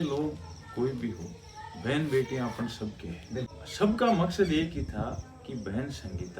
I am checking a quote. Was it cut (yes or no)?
yes